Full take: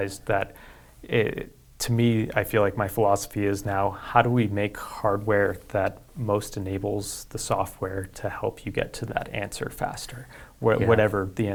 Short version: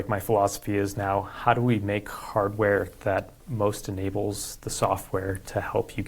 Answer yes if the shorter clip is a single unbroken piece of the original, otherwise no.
yes